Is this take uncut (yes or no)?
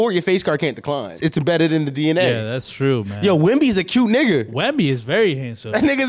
no